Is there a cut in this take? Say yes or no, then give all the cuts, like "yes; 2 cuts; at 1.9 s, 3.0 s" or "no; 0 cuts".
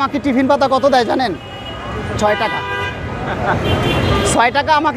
no; 0 cuts